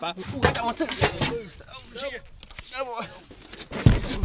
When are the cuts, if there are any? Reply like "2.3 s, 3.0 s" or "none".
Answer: 3.2 s